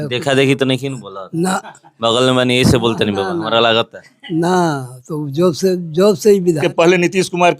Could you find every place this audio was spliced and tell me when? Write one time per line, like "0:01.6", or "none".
0:06.6